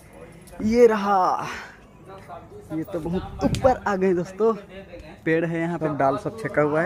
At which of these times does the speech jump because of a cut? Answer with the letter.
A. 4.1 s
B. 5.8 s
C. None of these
B